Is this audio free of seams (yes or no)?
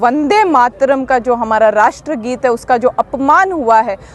yes